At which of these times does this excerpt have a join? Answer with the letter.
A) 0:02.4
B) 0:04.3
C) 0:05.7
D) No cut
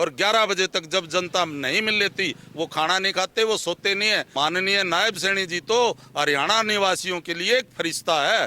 B